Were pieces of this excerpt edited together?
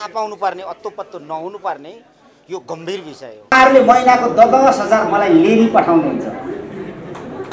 yes; 1 cut; at 3.5 s

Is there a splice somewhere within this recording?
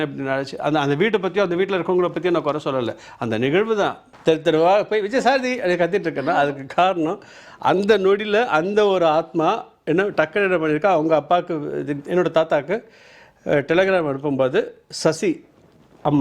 yes; 1 cut; at 4.1 s

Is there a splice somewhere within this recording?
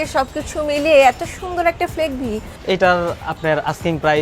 yes; 1 cut; at 2.5 s

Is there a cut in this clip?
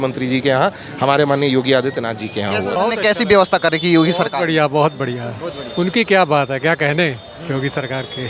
yes; 1 cut; at 2.8 s

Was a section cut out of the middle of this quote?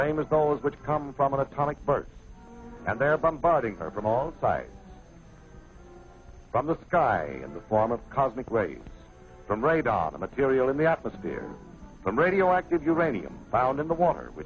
yes; 1 cut; at 8.6 s

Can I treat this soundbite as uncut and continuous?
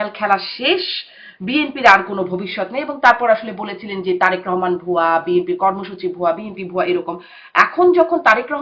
yes; 0 cuts

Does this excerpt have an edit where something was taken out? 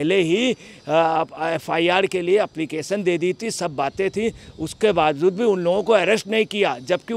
no; 0 cuts

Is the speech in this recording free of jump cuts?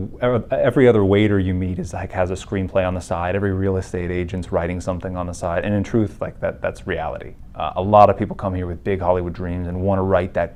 yes; 0 cuts

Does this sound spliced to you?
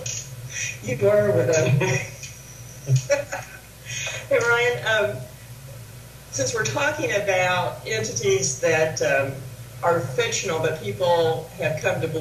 yes; 1 cut; at 7.2 s

